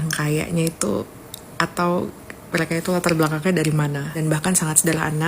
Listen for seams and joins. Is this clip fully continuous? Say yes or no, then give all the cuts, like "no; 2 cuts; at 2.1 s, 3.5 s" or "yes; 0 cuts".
no; 1 cut; at 4.2 s